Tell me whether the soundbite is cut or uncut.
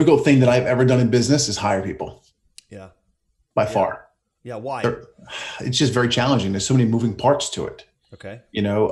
uncut